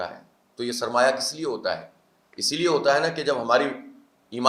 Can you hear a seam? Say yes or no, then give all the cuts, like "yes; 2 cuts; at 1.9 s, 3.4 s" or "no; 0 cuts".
no; 0 cuts